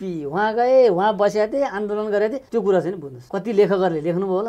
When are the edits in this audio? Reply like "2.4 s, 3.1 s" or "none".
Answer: 2.4 s, 3.1 s